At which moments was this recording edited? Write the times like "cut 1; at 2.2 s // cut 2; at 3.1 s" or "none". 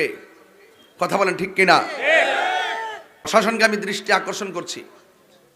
cut 1; at 3.3 s